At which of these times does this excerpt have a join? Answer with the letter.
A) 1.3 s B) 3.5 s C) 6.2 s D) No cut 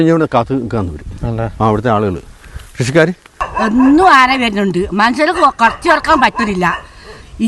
B